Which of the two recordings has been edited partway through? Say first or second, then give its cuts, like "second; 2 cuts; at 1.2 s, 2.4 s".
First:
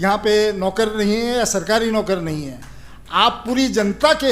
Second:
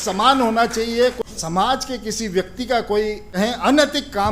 second; 2 cuts; at 1.2 s, 3.3 s